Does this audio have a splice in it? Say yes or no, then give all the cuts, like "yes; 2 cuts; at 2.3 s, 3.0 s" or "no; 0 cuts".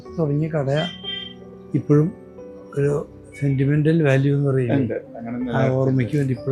no; 0 cuts